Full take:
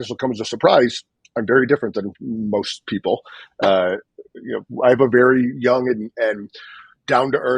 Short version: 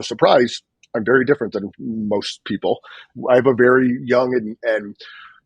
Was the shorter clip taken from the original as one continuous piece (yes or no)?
no